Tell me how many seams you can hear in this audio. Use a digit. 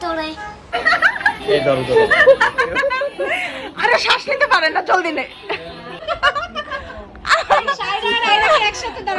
2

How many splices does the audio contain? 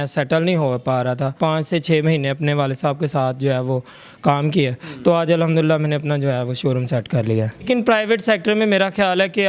2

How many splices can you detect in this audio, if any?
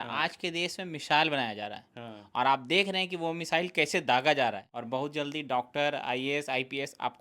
1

